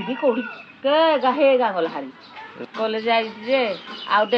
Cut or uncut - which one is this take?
uncut